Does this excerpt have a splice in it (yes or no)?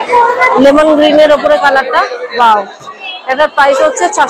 no